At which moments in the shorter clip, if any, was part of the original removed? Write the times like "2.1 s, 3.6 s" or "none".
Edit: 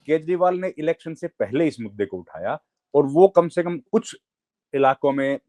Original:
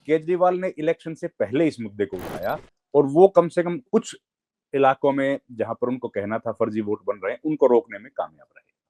none